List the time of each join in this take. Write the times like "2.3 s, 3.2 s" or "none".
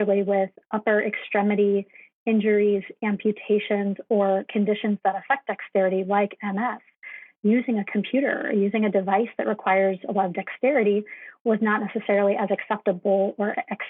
none